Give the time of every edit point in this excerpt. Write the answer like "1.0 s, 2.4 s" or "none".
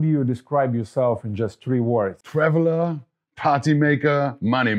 2.2 s